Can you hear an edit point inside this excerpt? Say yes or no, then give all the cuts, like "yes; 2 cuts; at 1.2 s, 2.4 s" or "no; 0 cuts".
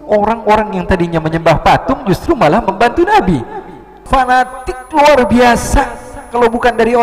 yes; 1 cut; at 4.0 s